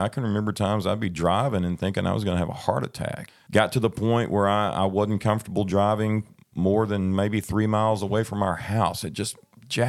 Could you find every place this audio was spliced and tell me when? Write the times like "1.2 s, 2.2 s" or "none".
3.2 s